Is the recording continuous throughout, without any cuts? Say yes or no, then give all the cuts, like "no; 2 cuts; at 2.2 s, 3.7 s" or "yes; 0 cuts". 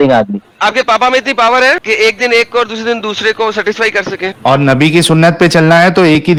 yes; 0 cuts